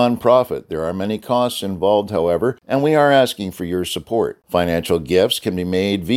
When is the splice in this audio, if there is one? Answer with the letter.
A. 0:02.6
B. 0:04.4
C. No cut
A